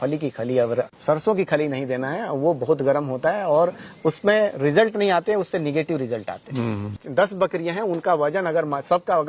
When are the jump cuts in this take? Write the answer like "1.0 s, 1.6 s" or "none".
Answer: 0.9 s, 6.9 s